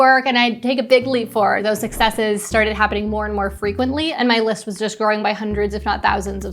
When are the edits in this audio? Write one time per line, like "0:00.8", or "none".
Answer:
0:01.6
0:04.1